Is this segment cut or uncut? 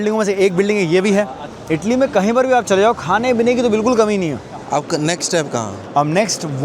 cut